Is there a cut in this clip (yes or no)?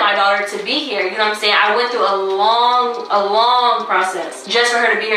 no